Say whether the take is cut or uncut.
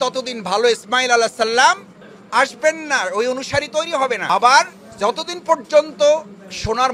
uncut